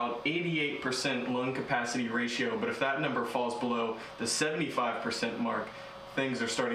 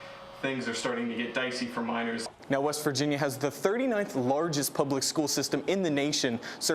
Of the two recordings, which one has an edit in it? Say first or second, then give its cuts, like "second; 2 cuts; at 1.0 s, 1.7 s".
second; 1 cut; at 2.2 s